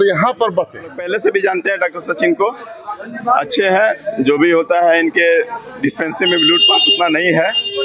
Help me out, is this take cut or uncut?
cut